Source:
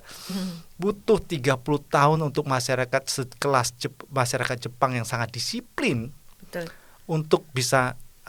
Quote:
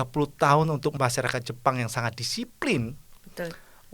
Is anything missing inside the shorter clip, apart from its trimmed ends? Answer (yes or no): yes